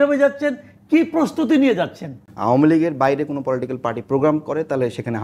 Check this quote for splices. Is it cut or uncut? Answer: cut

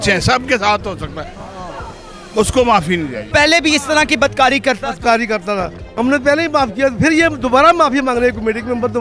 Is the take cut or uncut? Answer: cut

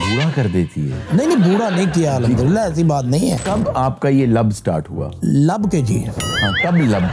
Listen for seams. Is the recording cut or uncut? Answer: cut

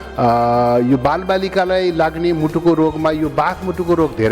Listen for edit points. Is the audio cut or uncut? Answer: uncut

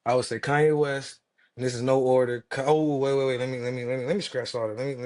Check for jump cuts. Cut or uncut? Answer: uncut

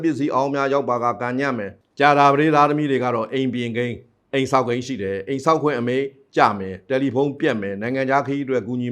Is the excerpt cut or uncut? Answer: cut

